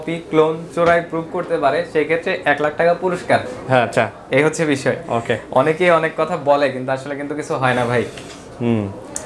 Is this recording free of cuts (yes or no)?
yes